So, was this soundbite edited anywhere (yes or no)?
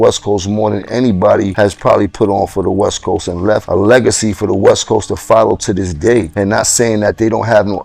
yes